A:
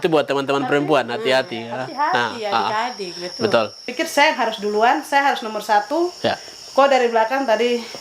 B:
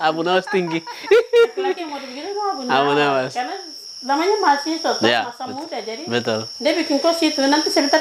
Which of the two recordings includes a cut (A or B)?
A